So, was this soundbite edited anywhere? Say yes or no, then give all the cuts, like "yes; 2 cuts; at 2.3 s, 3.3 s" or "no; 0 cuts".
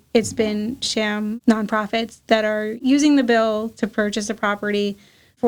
no; 0 cuts